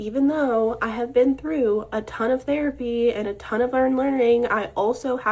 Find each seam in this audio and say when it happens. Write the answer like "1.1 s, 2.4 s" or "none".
4.0 s